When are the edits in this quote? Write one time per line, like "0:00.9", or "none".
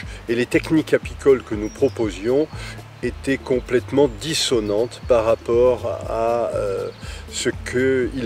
none